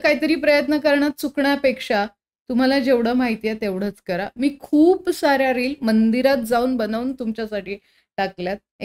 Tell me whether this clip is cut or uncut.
uncut